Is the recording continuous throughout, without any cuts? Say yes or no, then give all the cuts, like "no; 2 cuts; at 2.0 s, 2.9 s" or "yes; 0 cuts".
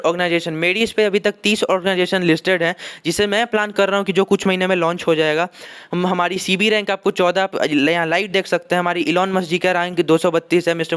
yes; 0 cuts